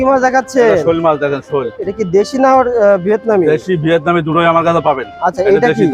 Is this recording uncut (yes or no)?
yes